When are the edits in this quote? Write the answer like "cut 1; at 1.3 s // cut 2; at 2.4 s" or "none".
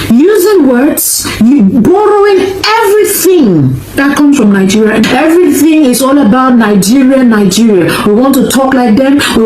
none